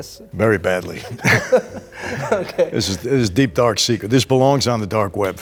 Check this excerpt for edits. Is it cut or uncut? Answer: uncut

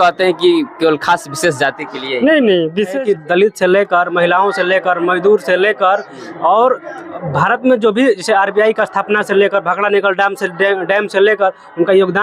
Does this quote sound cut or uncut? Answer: cut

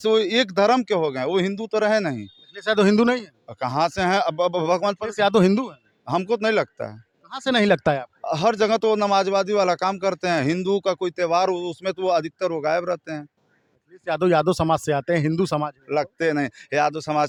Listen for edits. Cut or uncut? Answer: uncut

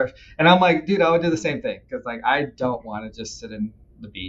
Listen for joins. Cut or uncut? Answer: cut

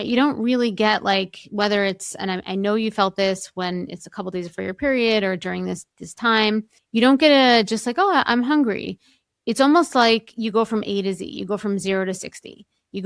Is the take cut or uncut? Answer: uncut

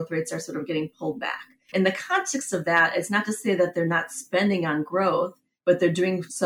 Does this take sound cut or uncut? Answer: uncut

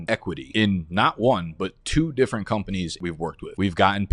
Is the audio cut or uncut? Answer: uncut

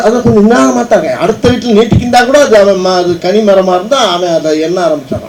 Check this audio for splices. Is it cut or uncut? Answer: uncut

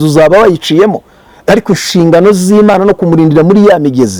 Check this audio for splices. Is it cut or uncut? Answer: uncut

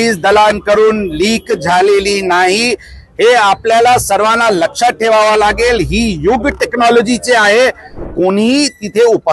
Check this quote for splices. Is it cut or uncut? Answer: cut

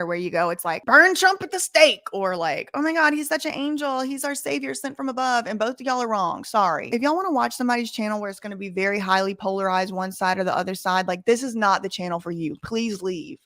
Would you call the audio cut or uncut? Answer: uncut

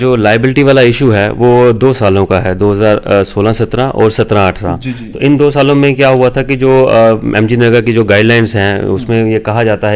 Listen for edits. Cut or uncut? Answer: uncut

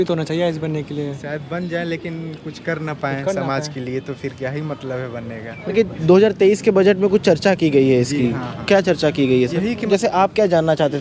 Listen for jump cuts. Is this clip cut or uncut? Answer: cut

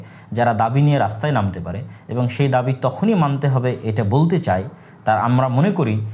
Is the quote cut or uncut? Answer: uncut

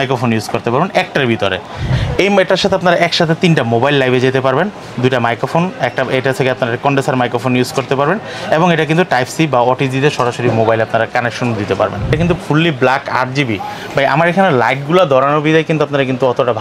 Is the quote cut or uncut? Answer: cut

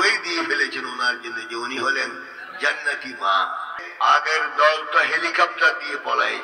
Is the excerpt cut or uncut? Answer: cut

